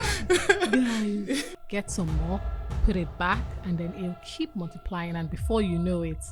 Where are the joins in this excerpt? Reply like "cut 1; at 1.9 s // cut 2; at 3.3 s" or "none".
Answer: cut 1; at 1.5 s